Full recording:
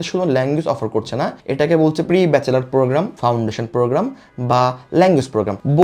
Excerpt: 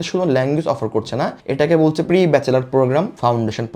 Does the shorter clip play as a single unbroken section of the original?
yes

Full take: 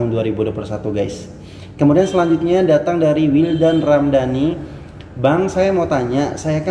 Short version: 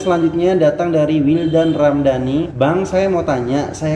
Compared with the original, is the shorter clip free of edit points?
no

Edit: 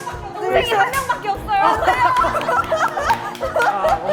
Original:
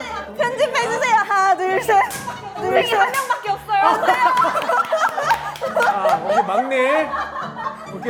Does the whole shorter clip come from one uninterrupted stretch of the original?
yes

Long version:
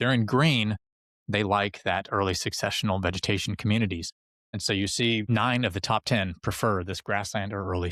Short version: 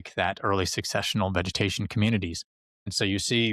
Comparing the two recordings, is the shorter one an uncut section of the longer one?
yes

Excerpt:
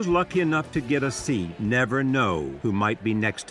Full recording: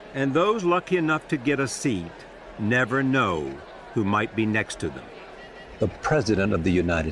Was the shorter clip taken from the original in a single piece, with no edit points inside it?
no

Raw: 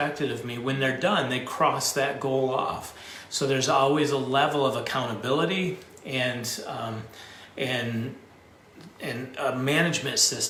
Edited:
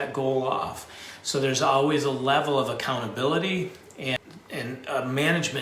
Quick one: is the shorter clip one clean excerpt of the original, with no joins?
no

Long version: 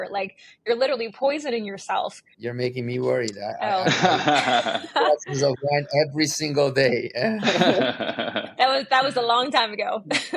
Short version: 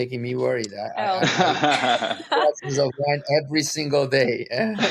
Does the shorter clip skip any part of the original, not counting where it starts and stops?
no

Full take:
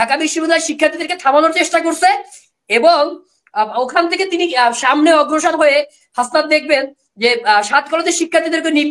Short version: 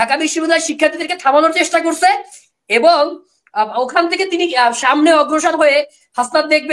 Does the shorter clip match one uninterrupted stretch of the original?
yes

